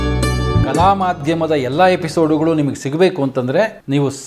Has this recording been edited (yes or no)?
no